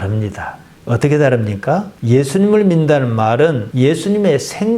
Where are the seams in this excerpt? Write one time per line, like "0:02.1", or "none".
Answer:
none